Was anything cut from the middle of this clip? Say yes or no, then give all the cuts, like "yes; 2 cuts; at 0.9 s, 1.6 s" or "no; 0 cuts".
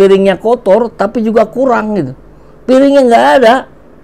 no; 0 cuts